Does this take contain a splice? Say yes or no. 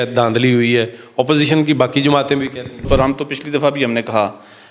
yes